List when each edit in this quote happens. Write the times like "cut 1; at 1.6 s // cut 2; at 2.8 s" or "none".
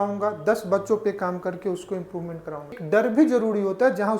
cut 1; at 2.7 s